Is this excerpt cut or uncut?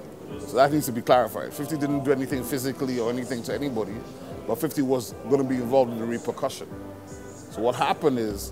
uncut